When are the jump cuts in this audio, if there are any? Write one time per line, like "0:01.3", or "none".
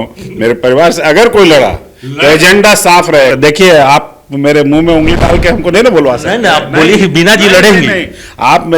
0:03.3